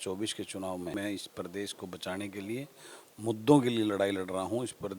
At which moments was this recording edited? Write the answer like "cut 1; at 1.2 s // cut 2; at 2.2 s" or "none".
cut 1; at 0.9 s